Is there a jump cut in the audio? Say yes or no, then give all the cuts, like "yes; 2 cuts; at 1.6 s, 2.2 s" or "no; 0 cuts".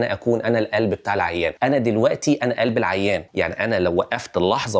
yes; 1 cut; at 1.6 s